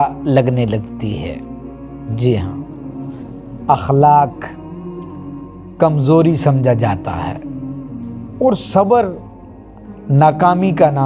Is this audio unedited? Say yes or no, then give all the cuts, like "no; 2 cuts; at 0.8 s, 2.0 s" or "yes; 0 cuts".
yes; 0 cuts